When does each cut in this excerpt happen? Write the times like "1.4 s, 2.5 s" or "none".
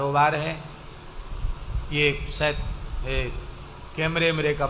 none